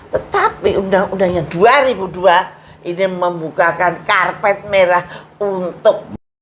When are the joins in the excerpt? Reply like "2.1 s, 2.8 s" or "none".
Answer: none